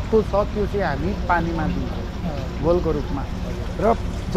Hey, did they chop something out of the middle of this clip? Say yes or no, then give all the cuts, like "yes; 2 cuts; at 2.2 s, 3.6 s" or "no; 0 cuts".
no; 0 cuts